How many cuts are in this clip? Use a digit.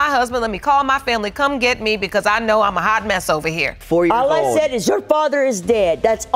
1